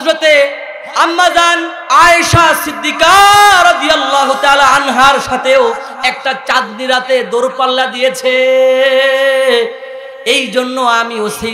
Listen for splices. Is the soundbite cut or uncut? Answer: uncut